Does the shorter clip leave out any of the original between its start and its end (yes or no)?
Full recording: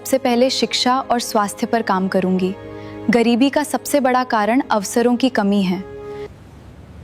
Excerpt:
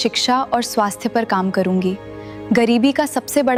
no